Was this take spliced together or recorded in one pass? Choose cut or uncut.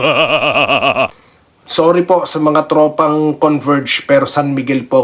cut